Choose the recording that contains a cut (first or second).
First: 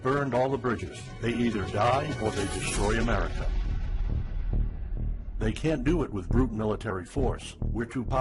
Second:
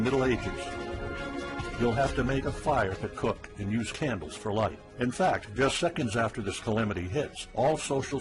first